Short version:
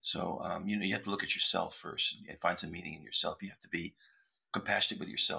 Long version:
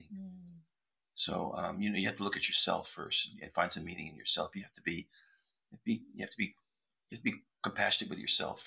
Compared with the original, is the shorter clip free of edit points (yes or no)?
no